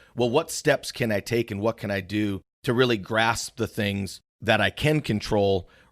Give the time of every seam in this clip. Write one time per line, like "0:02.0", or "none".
0:02.5

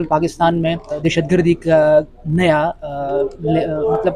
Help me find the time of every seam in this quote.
0:01.0

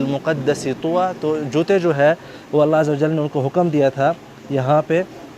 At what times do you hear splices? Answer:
none

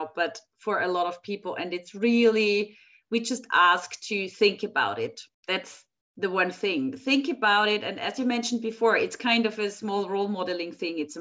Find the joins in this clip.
0:05.3

